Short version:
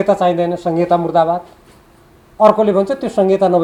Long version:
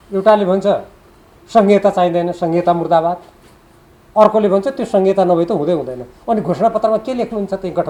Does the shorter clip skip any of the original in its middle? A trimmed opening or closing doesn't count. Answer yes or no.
no